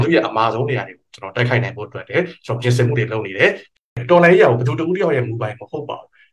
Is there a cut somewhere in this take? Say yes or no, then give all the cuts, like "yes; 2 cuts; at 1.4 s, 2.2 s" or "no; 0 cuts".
yes; 1 cut; at 3.9 s